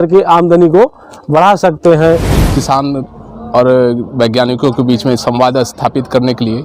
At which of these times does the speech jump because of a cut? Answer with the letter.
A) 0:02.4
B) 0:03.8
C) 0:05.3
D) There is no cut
A